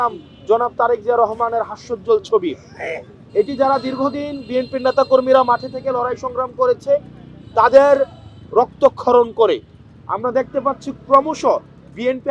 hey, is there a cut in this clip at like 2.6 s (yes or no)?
no